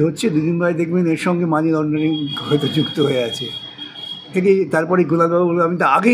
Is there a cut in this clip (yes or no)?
yes